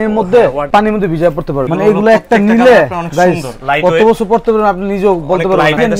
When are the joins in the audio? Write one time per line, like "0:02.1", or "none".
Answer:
0:01.7